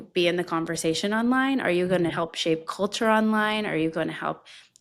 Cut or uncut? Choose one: uncut